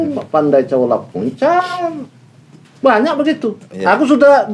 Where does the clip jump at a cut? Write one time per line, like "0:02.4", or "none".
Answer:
none